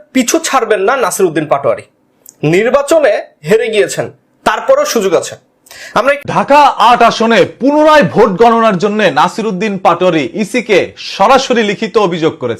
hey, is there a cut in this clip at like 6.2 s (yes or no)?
yes